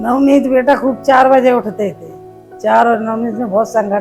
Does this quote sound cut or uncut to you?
uncut